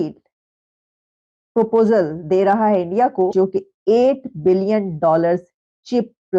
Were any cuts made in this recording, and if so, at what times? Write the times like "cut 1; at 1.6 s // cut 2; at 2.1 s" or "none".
cut 1; at 3.3 s